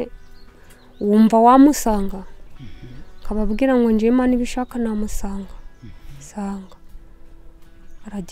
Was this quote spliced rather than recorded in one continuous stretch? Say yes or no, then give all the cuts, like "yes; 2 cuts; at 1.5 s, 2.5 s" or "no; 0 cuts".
no; 0 cuts